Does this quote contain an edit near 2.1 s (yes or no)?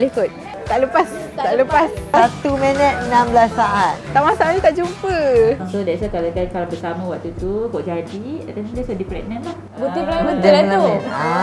yes